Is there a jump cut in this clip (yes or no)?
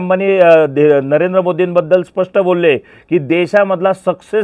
no